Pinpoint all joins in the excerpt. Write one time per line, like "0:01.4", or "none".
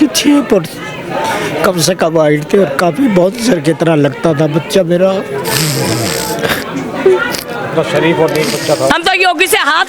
0:08.9